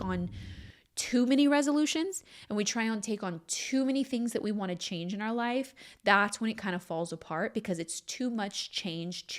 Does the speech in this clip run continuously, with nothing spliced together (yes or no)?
yes